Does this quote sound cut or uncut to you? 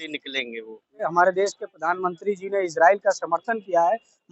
cut